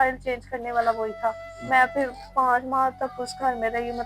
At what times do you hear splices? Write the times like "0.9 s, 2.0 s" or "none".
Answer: 1.5 s